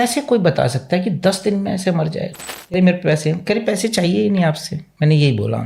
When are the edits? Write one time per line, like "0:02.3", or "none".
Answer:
0:02.7